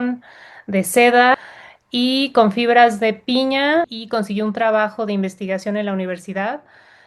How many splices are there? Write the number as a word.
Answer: two